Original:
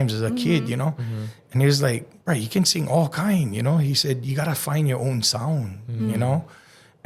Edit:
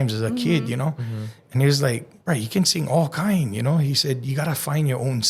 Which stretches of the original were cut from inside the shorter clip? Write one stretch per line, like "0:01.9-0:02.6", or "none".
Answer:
none